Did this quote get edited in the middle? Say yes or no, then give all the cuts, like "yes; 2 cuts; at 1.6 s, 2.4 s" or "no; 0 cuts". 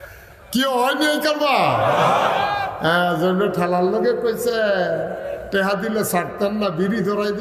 no; 0 cuts